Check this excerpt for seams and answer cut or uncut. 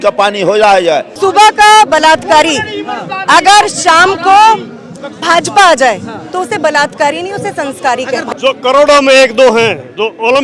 cut